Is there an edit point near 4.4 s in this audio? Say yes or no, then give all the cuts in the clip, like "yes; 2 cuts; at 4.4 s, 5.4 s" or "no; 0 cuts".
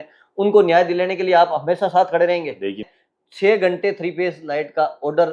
no; 1 cut; at 2.9 s